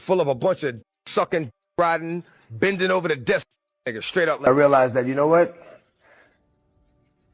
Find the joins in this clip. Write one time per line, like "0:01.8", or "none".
0:04.4